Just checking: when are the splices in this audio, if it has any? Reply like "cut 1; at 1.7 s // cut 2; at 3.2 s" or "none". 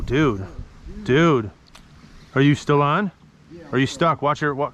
none